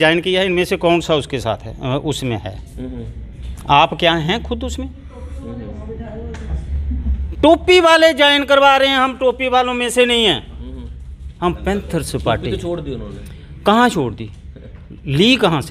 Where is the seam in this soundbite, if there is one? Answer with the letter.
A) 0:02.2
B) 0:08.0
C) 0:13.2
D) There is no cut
D